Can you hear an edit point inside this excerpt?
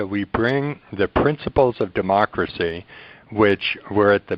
no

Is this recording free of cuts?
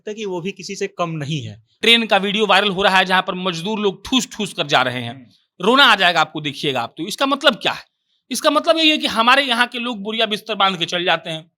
no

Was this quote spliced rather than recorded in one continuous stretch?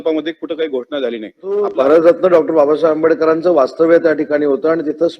yes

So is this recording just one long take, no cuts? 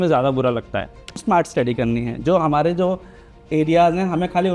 no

